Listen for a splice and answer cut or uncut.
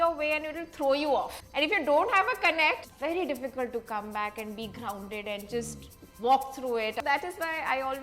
cut